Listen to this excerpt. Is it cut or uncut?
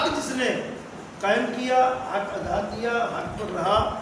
uncut